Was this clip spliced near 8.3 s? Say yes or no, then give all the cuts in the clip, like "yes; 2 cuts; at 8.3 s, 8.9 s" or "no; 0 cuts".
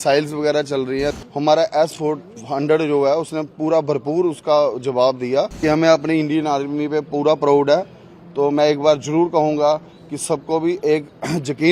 no; 2 cuts; at 1.1 s, 5.6 s